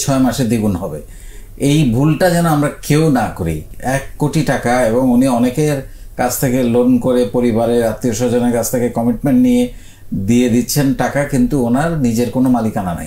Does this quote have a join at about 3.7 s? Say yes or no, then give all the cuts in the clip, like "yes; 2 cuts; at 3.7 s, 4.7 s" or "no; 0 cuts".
yes; 1 cut; at 3.7 s